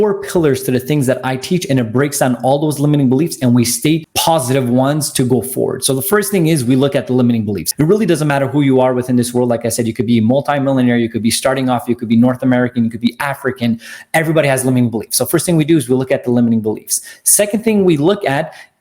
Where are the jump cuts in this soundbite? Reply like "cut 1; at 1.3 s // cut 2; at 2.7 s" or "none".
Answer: cut 1; at 4.1 s // cut 2; at 7.6 s